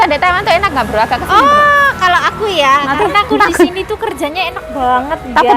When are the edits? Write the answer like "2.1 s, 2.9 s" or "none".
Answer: none